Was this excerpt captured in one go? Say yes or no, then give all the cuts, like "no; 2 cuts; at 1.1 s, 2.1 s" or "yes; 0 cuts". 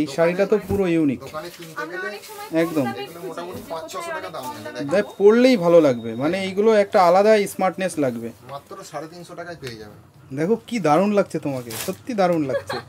yes; 0 cuts